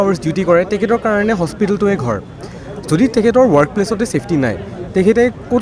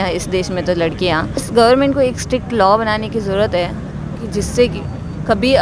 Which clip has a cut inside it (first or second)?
second